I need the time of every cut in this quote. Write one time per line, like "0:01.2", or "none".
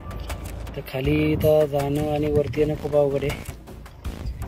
0:00.7
0:03.3